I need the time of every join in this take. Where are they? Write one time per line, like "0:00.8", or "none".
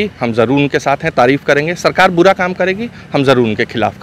none